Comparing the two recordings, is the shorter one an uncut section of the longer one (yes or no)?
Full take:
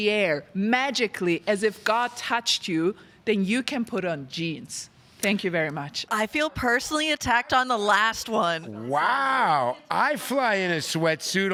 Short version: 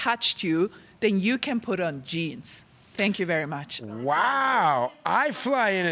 no